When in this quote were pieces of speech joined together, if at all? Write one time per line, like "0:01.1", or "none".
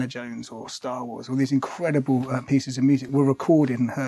0:03.1